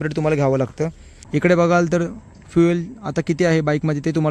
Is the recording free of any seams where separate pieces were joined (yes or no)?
no